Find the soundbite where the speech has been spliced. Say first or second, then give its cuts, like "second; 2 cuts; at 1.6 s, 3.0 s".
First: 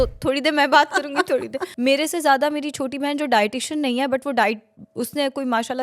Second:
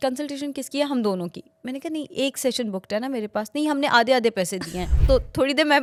first; 1 cut; at 1.6 s